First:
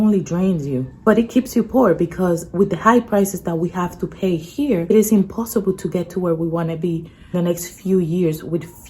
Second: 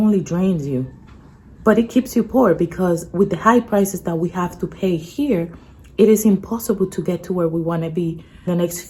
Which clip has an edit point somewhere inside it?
first; 2 cuts; at 0.9 s, 4.9 s

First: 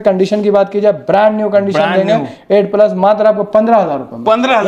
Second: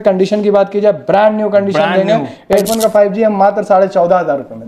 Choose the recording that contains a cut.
second; 1 cut; at 2.6 s

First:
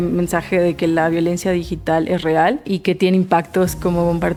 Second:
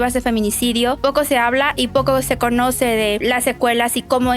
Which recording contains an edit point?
second; 2 cuts; at 1.0 s, 3.2 s

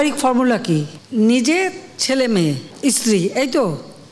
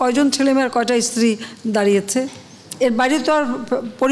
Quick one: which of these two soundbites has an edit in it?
first; 2 cuts; at 1.0 s, 2.7 s

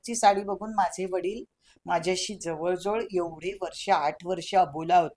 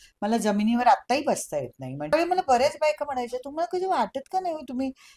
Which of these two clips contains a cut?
second; 1 cut; at 2.1 s

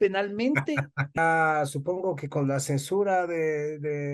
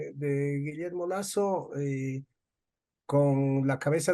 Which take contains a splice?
first; 1 cut; at 1.2 s

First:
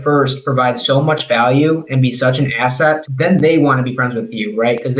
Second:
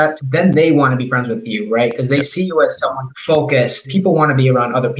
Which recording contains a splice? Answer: second; 2 cuts; at 3.1 s, 3.9 s

